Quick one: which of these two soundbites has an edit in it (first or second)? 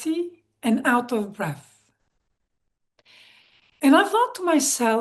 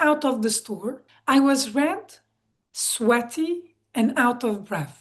second